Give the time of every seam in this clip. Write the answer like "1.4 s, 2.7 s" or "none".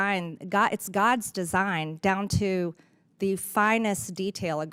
none